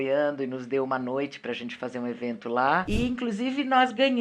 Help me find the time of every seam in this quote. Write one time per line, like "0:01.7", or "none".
0:02.9